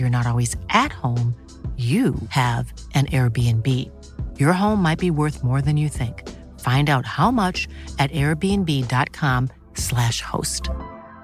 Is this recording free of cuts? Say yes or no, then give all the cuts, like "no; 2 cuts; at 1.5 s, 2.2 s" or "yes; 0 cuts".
yes; 0 cuts